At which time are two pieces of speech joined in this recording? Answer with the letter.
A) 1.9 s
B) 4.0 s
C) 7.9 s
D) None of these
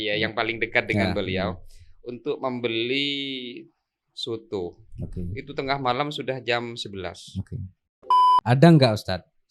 C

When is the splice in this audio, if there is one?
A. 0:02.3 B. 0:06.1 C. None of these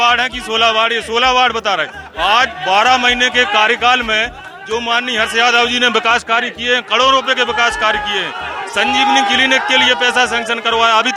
C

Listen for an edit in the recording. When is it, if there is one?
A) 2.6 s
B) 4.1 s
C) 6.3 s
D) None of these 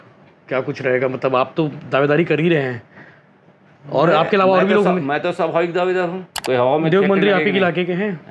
C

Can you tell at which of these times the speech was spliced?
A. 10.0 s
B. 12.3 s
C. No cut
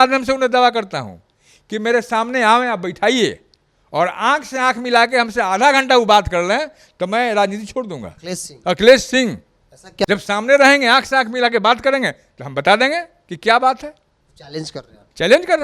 A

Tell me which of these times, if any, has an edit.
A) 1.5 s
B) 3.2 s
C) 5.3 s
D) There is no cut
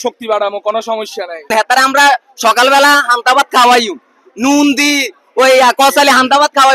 A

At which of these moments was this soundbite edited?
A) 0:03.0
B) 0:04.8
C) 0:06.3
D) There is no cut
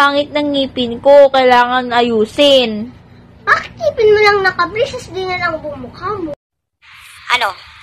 C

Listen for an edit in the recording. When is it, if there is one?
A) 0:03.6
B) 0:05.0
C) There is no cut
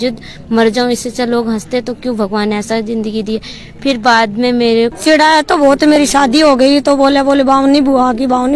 B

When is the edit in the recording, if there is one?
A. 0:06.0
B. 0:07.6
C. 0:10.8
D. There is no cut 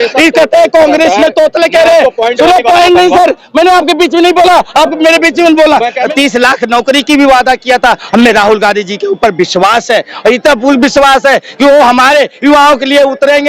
A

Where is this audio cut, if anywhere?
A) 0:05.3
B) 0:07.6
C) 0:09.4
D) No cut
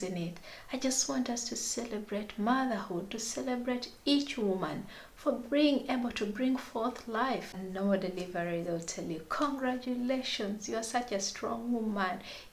B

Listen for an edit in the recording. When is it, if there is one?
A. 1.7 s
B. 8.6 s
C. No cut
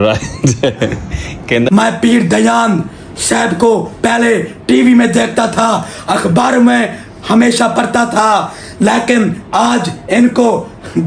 A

